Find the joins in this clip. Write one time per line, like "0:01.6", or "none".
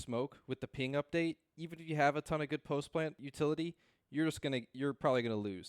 0:03.2